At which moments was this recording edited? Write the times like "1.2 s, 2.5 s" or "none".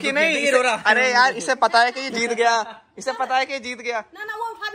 none